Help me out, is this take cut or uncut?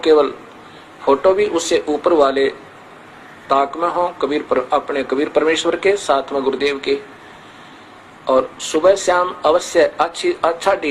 uncut